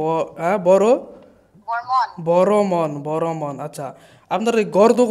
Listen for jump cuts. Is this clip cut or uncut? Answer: uncut